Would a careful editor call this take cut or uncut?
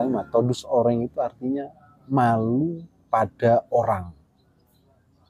uncut